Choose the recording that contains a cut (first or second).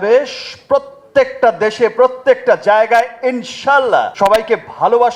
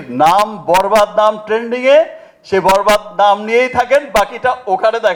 first